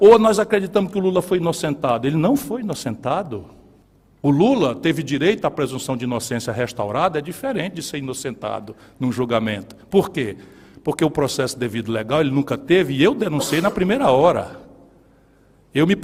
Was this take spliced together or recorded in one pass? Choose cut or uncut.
uncut